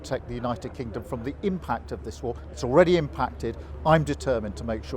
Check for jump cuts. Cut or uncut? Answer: uncut